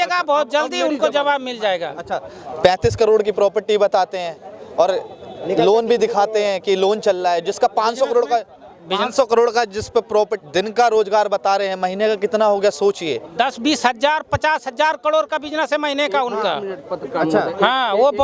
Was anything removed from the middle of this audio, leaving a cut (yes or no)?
no